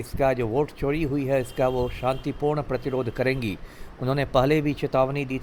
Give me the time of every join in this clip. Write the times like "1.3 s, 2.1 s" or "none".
none